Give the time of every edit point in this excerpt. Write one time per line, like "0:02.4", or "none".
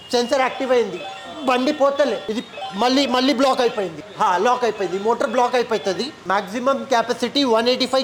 none